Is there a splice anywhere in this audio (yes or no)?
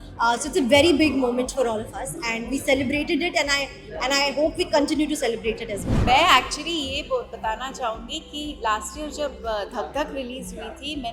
yes